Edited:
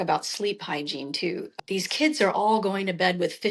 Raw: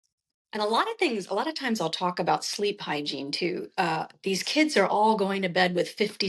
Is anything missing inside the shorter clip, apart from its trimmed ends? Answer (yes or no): yes